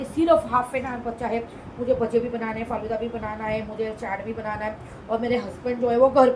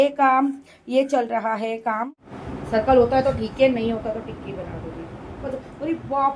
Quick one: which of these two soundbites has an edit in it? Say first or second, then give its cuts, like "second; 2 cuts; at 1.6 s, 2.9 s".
second; 2 cuts; at 2.2 s, 5.5 s